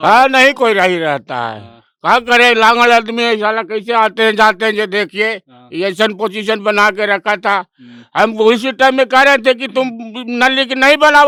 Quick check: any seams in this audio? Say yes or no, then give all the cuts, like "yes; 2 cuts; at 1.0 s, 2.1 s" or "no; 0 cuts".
no; 0 cuts